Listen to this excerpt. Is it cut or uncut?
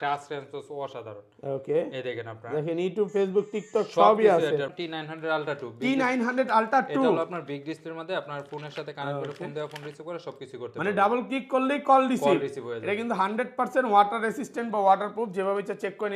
cut